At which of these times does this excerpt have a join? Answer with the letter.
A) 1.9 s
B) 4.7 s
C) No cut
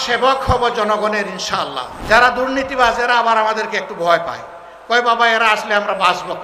A